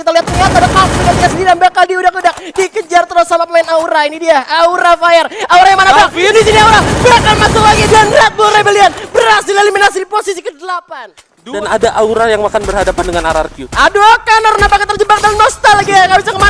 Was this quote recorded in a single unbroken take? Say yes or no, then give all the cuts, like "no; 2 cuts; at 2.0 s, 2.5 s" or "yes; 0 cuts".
no; 1 cut; at 11.6 s